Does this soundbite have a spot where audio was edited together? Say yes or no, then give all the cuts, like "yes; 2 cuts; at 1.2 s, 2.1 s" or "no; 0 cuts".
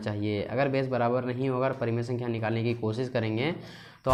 no; 0 cuts